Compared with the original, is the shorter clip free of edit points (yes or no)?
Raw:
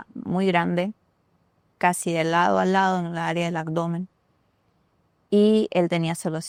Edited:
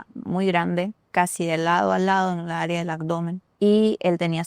no